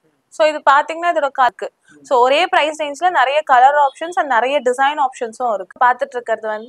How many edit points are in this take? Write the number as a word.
two